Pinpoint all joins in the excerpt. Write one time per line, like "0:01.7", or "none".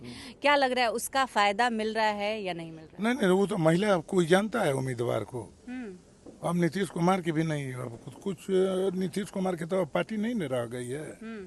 none